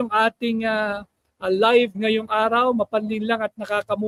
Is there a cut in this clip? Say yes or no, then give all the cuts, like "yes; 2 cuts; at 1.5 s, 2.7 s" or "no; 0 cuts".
no; 0 cuts